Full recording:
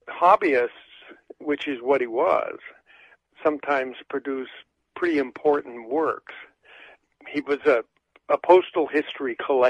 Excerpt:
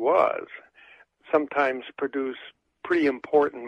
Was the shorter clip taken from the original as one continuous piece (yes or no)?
yes